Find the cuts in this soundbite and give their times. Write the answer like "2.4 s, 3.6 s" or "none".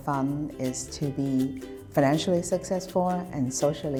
none